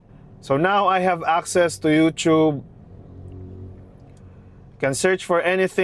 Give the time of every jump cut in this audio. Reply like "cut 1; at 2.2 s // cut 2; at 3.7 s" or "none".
none